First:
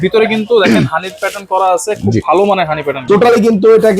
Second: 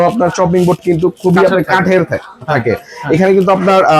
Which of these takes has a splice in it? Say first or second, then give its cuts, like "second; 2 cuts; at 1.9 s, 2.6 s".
first; 1 cut; at 3.0 s